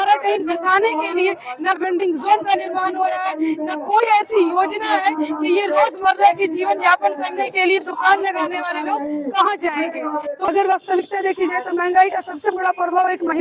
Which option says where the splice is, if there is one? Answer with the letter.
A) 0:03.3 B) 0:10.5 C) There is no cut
B